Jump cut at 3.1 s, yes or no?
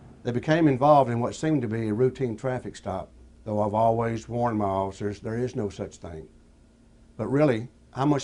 no